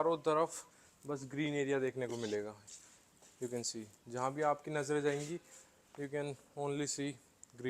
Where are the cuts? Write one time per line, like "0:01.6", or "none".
none